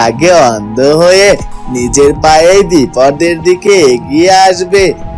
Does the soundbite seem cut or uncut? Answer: uncut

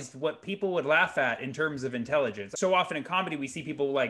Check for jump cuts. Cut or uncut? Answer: cut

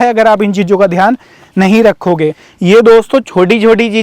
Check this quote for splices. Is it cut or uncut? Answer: cut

